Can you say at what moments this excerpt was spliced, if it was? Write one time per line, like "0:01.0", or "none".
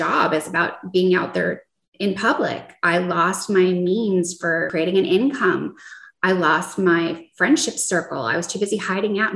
0:04.6